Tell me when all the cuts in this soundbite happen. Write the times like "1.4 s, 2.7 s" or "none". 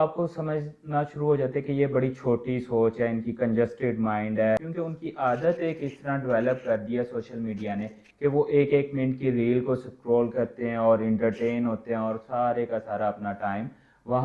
4.6 s

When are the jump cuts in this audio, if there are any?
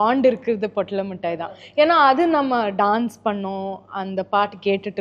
none

